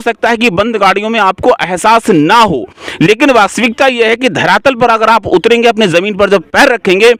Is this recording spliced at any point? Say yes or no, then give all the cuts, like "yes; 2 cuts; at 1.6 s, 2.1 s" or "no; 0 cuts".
no; 0 cuts